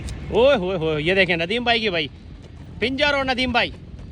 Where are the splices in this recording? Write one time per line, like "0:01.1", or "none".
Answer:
none